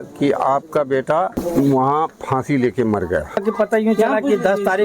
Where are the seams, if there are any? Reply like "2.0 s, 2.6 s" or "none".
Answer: none